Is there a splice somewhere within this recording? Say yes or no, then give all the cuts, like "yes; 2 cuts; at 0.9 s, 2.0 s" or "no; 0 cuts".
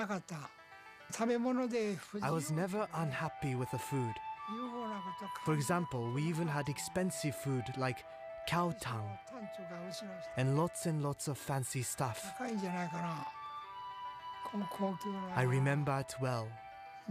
yes; 1 cut; at 15.2 s